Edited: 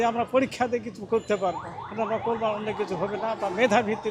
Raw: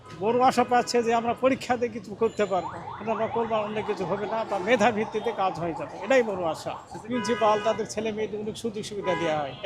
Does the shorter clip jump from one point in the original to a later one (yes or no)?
no